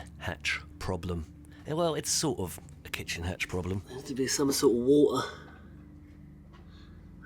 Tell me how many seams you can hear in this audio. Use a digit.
1